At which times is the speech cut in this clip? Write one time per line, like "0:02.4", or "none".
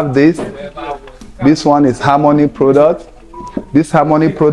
none